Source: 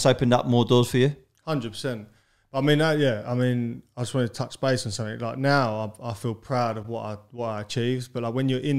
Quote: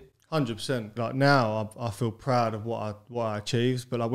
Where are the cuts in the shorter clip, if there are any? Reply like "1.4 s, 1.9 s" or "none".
0.9 s